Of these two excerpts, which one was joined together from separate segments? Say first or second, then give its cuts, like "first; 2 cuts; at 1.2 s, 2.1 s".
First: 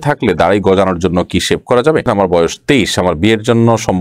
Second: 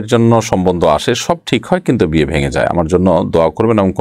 first; 1 cut; at 2.0 s